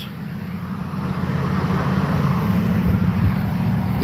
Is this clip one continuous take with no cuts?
yes; 0 cuts

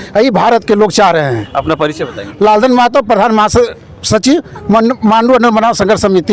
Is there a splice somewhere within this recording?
no; 0 cuts

